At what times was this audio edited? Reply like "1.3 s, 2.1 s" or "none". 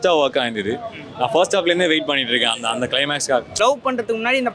3.5 s